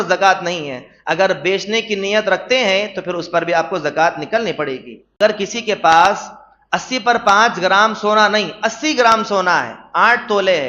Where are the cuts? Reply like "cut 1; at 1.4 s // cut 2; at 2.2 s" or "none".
cut 1; at 5.2 s